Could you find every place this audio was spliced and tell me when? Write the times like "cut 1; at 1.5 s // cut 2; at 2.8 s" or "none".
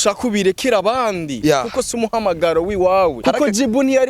cut 1; at 3.2 s